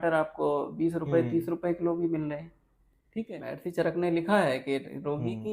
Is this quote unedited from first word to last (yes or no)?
no